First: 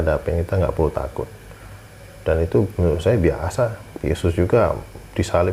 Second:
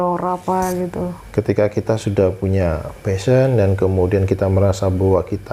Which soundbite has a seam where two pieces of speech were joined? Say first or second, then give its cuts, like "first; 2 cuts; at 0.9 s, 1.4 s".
second; 1 cut; at 1.2 s